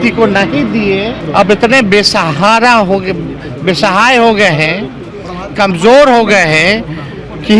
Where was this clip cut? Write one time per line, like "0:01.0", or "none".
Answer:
0:01.2